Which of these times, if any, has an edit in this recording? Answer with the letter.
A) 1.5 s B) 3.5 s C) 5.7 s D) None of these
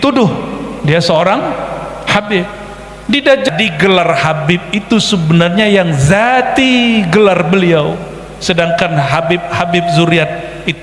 B